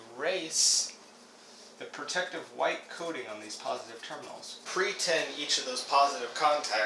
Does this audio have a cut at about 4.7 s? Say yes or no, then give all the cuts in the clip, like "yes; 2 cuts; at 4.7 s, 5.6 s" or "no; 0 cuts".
yes; 1 cut; at 4.7 s